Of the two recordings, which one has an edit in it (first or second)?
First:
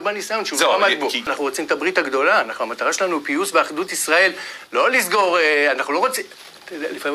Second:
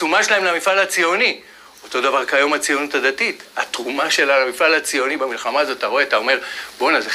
first